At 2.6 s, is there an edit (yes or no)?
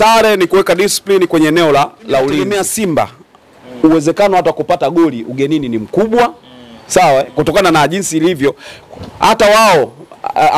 yes